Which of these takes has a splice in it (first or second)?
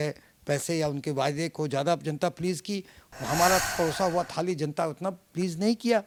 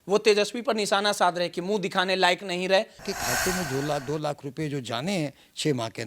second